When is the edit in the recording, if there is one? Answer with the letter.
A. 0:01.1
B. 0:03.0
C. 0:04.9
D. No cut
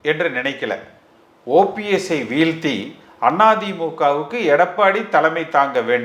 D